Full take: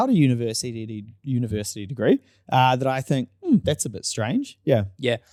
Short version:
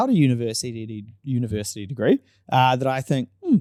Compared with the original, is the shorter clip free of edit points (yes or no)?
yes